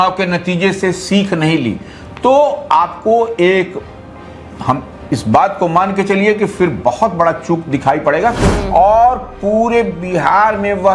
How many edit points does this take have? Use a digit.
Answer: 1